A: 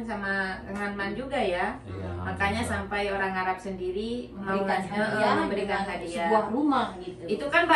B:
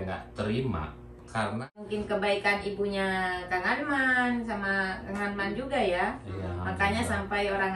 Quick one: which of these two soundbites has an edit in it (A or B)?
B